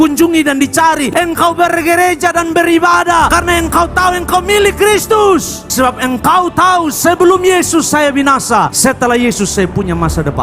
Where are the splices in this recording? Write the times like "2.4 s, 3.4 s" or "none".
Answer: 5.7 s